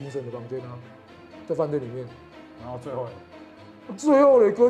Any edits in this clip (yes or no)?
no